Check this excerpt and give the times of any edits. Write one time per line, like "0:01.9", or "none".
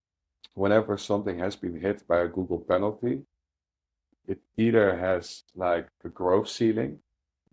none